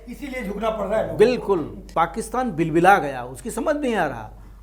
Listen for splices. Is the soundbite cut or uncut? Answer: cut